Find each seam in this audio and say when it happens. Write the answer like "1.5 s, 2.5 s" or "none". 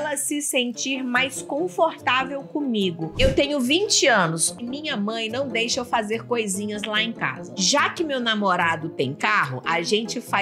3.2 s, 4.4 s, 7.5 s